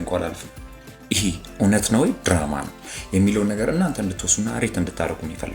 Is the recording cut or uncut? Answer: cut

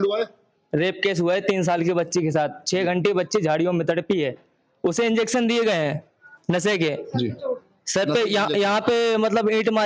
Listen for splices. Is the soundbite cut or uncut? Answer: uncut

